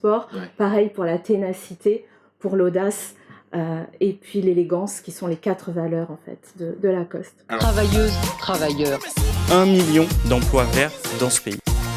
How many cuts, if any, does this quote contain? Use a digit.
1